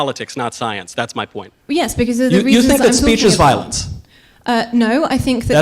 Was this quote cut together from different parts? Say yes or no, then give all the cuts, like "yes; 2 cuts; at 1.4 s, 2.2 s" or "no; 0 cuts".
yes; 1 cut; at 1.5 s